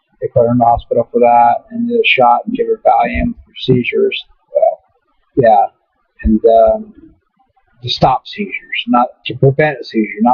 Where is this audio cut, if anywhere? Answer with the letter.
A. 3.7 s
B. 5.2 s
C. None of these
B